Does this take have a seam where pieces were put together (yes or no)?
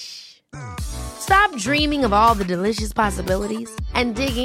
no